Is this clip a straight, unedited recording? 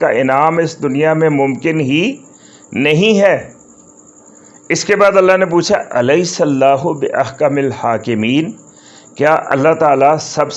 yes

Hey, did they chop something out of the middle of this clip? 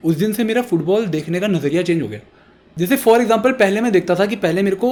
no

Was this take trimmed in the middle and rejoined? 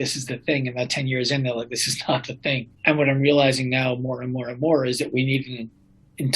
yes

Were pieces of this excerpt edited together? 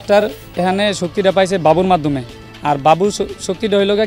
no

